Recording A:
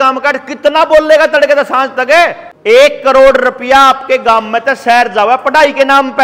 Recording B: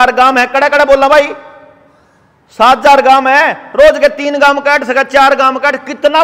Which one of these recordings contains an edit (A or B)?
A